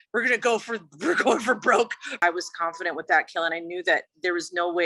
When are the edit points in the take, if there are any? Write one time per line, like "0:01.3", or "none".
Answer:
0:02.1